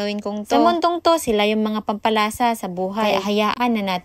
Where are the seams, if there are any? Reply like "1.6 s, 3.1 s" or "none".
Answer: none